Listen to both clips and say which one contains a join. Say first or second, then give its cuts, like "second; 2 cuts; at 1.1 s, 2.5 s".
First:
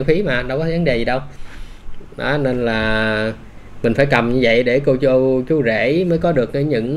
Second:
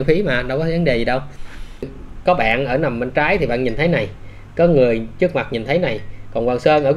second; 1 cut; at 2.0 s